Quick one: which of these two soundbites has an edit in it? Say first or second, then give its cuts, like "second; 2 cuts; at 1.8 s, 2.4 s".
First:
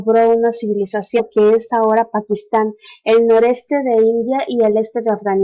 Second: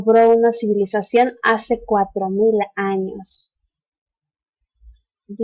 second; 1 cut; at 1.2 s